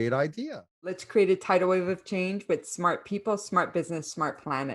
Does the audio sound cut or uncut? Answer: cut